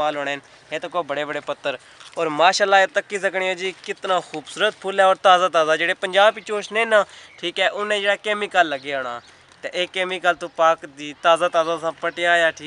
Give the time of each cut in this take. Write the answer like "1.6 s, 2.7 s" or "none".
none